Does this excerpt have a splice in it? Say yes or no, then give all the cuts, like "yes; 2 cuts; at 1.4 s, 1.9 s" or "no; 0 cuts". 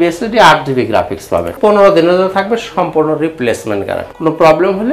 yes; 2 cuts; at 1.5 s, 4.0 s